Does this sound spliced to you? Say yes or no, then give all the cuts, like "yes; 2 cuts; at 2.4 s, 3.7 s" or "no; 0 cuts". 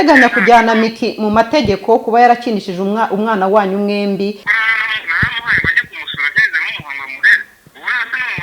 yes; 1 cut; at 4.5 s